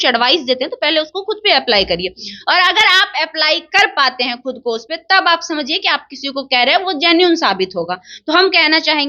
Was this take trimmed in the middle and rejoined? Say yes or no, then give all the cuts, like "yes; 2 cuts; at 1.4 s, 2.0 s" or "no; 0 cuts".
no; 0 cuts